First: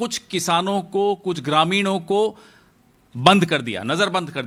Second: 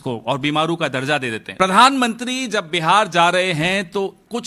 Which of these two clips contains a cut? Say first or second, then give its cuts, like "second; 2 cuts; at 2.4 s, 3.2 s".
second; 1 cut; at 1.4 s